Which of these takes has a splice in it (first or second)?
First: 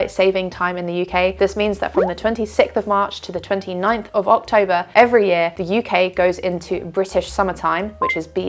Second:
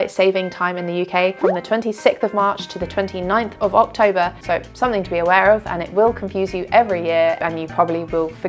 second